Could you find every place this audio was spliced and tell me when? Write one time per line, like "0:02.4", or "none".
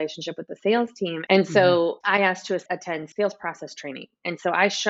0:01.2

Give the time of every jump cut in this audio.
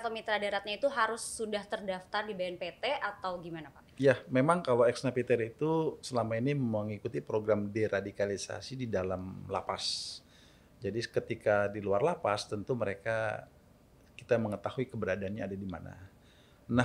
none

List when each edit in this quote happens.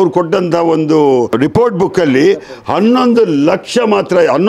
0:01.3

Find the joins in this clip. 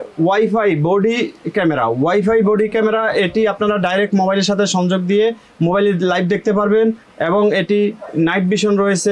none

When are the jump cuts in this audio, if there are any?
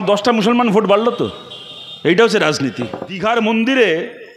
0:03.1

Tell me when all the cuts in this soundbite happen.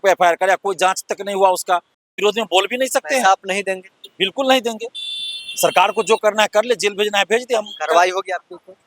0:02.1

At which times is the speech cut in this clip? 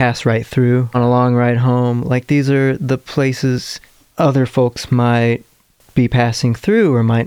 0:01.0

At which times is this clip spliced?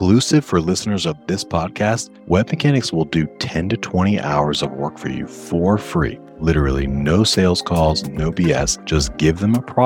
0:02.1
0:06.2
0:08.8

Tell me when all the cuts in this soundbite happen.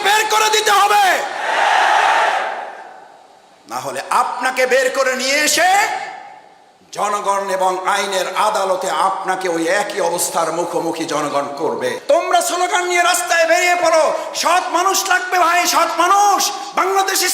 0:12.0

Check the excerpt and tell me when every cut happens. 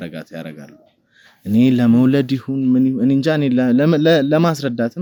none

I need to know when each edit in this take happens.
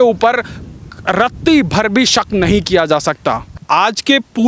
0:03.6

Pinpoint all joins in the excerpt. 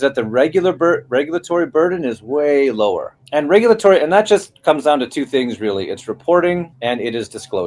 0:03.2
0:06.7

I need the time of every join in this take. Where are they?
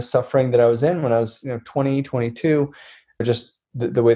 0:03.2

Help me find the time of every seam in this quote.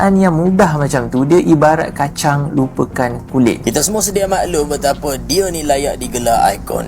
0:03.6

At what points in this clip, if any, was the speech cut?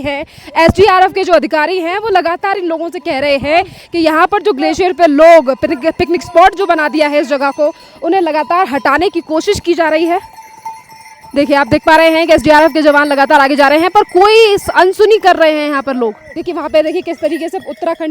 0:16.3

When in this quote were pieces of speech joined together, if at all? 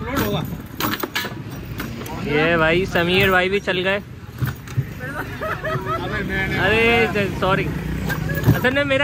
none

